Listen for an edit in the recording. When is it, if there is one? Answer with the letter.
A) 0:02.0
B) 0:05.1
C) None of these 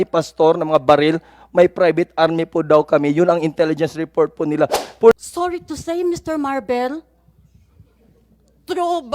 B